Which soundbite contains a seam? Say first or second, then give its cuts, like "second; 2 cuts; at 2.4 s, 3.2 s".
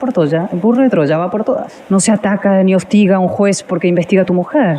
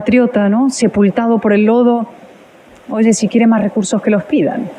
first; 1 cut; at 1.7 s